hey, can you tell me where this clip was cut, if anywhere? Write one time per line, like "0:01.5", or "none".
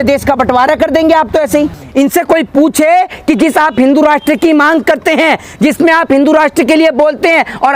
0:01.8